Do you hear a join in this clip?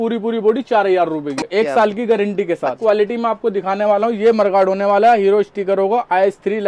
yes; 2 cuts; at 1.3 s, 2.8 s

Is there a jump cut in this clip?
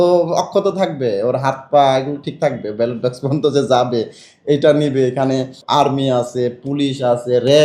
yes; 1 cut; at 5.6 s

